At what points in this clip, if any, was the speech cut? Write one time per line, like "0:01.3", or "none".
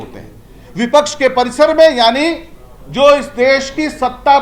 none

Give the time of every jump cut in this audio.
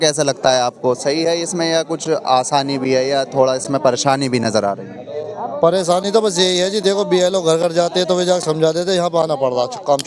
none

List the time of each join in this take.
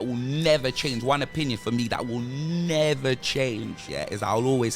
0:03.8

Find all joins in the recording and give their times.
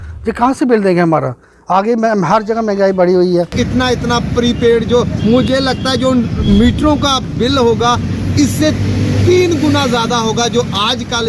0:03.5

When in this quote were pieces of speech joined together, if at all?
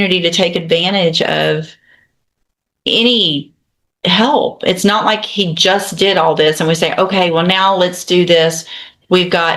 none

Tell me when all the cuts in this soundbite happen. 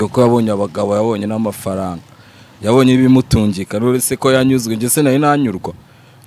none

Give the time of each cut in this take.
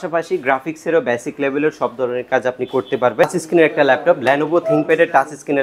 0:03.2

